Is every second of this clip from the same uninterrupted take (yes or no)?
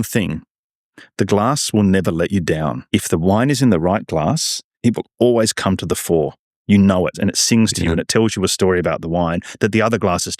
no